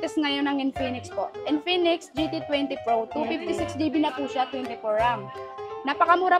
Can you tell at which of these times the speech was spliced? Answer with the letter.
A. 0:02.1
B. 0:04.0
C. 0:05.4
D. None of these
D